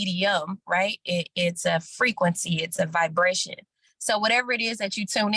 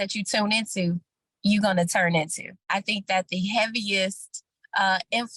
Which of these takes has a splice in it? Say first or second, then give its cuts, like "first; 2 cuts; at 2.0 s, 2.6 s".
second; 1 cut; at 2.6 s